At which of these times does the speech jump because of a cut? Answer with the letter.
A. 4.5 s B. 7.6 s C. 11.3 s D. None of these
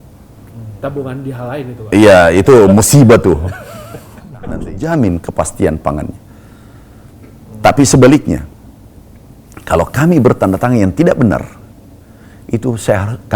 A